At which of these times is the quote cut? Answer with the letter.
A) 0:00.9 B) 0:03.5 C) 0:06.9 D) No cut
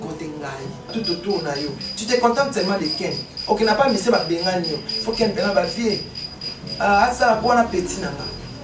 A